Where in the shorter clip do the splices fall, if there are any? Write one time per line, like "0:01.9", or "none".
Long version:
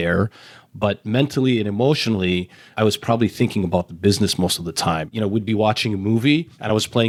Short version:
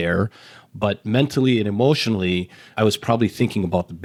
none